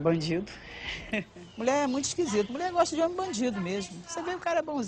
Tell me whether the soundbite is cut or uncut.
cut